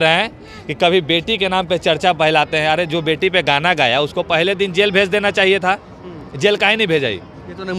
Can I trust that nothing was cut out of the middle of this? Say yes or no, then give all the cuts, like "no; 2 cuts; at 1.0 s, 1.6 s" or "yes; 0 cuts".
yes; 0 cuts